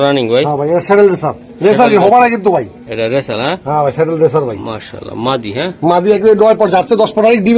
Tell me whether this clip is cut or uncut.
uncut